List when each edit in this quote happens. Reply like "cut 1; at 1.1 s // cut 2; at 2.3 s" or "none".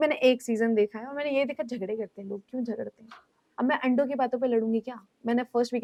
none